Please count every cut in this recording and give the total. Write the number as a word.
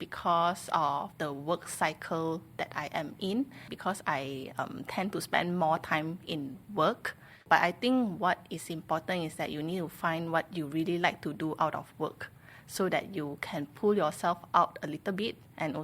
three